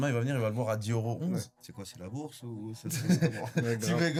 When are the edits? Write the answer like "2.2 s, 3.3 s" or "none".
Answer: none

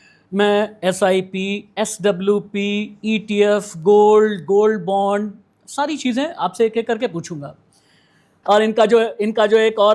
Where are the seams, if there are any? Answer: 8.3 s

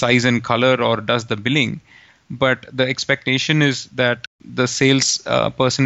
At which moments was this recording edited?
4.4 s

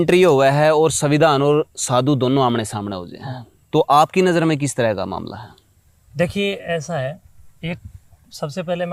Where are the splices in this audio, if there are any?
none

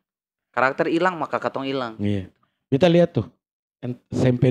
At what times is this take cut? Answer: none

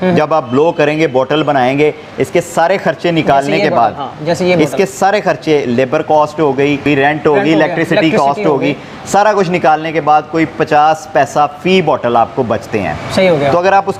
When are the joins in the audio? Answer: 6.8 s

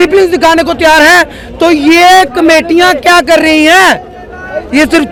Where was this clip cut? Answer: none

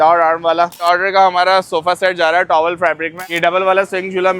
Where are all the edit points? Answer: 0.8 s, 3.3 s

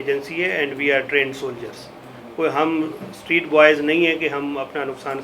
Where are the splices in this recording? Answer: none

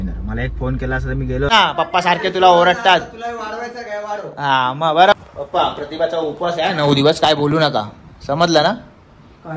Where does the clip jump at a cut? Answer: 1.5 s, 5.1 s

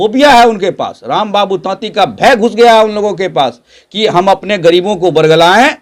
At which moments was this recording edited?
none

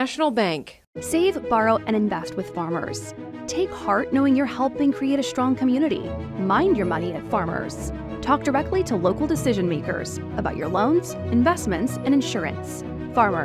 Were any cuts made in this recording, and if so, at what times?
none

